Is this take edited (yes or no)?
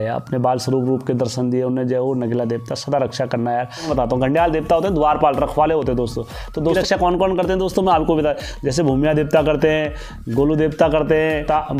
yes